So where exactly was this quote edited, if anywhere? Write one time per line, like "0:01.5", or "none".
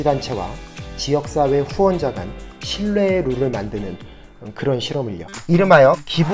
0:05.3

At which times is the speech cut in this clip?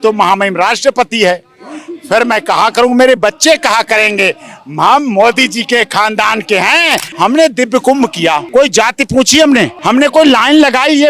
0:07.1
0:08.4
0:09.8

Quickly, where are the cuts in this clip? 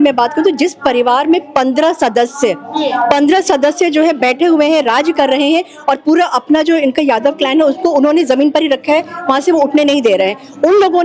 none

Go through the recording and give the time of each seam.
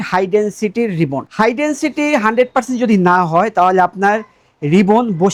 none

